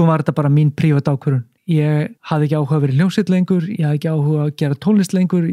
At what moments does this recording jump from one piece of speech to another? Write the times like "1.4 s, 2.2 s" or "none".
1.5 s, 2.2 s

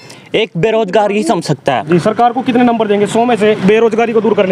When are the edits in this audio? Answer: 1.8 s, 3.6 s

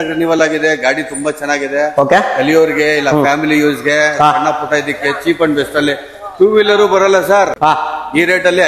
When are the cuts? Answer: none

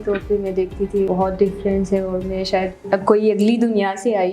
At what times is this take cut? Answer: 1.1 s, 2.8 s

